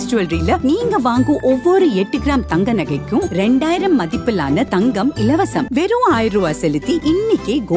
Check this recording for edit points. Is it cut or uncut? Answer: uncut